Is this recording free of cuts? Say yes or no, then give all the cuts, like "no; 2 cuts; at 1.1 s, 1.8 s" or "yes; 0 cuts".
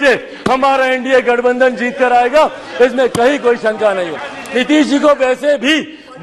no; 1 cut; at 4.4 s